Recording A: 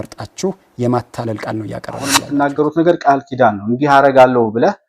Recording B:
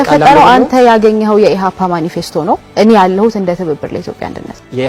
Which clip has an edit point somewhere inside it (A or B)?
A